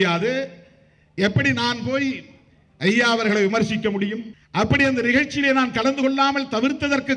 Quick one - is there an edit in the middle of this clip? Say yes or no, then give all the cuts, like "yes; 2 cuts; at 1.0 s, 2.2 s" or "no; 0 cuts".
yes; 1 cut; at 4.3 s